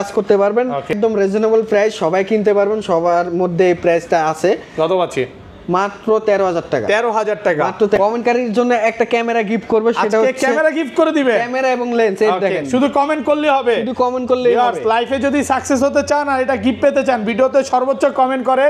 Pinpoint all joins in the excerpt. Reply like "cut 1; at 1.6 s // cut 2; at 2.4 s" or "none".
cut 1; at 0.9 s // cut 2; at 8.0 s

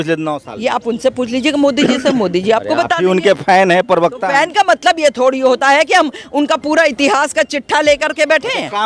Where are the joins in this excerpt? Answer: none

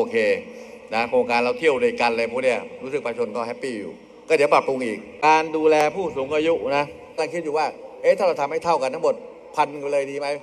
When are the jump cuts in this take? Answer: cut 1; at 5.1 s // cut 2; at 7.2 s

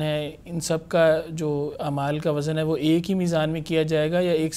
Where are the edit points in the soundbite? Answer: none

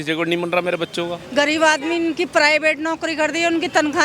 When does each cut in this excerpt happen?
cut 1; at 1.2 s

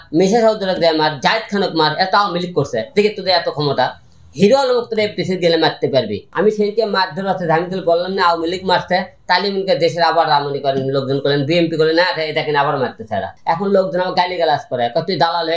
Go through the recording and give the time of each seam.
cut 1; at 6.2 s // cut 2; at 13.3 s

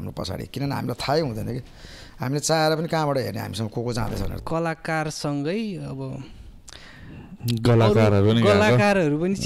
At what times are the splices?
cut 1; at 4.4 s

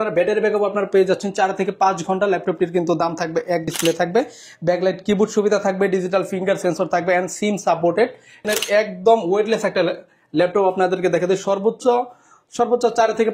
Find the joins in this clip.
cut 1; at 3.7 s // cut 2; at 8.4 s

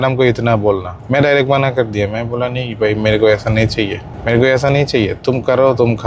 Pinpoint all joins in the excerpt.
cut 1; at 0.9 s // cut 2; at 4.1 s

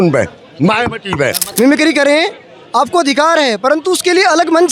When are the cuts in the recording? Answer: cut 1; at 1.4 s

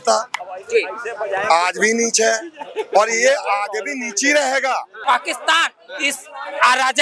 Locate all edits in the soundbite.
cut 1; at 4.9 s

